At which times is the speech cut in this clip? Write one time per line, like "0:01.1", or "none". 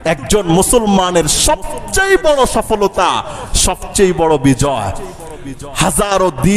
none